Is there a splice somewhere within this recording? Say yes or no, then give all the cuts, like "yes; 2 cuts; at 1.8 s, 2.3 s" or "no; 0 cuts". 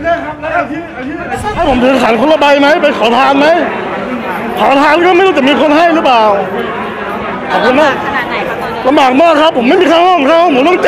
yes; 1 cut; at 1.6 s